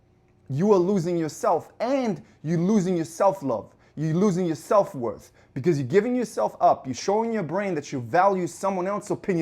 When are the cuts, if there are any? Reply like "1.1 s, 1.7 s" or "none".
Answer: none